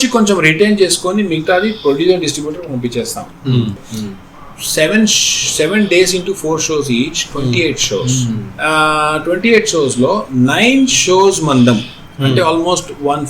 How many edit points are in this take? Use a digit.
2